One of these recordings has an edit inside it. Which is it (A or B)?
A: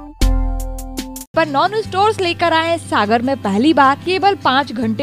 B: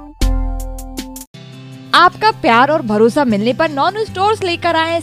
A